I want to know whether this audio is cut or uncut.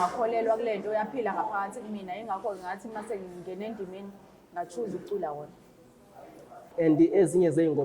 cut